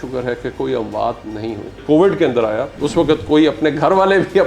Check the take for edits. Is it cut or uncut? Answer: cut